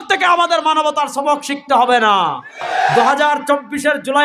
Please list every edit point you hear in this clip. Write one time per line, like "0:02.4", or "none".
0:03.0